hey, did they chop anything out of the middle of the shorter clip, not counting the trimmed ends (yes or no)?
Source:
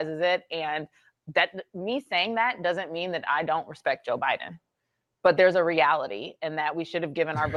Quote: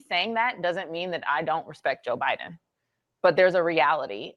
no